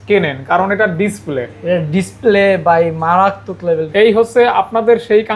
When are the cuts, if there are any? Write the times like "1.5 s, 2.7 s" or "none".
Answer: 3.9 s